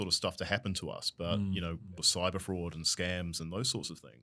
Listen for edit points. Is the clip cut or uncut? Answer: cut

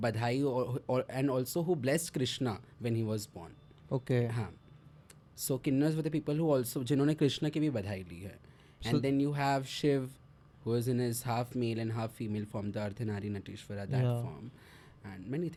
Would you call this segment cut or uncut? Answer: uncut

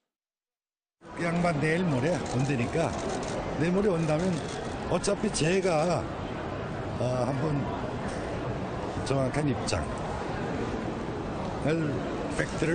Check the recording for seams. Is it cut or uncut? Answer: cut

